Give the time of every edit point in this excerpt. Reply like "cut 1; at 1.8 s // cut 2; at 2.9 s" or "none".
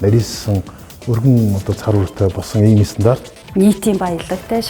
cut 1; at 3.3 s